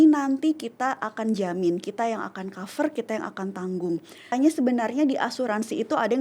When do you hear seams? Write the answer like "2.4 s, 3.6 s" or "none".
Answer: 4.3 s

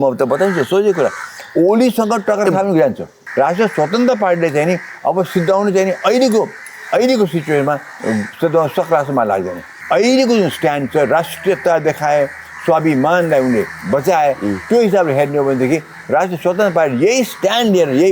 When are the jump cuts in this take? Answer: 3.2 s, 9.7 s

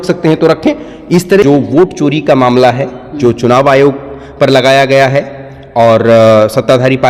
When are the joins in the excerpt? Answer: 1.4 s

